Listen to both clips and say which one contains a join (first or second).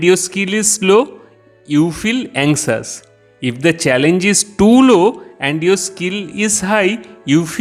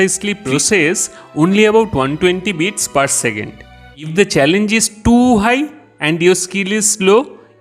second